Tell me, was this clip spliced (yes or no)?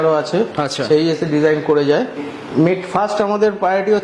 yes